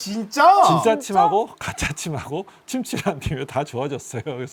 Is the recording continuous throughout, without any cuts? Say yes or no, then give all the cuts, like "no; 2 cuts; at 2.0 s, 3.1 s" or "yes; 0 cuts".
yes; 0 cuts